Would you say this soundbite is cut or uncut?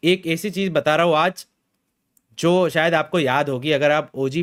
uncut